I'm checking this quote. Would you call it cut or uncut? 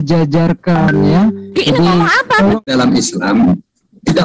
cut